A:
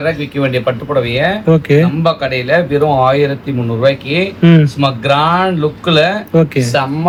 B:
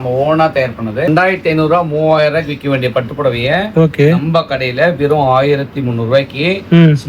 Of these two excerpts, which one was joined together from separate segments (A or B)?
B